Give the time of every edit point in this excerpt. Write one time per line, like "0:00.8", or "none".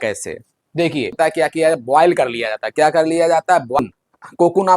0:01.1
0:03.8